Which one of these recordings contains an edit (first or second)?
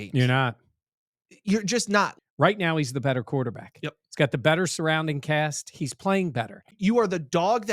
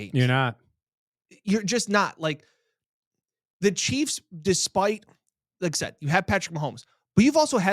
first